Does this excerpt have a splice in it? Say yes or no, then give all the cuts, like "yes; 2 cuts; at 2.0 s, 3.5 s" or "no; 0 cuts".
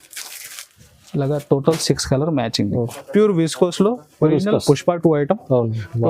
yes; 1 cut; at 3.0 s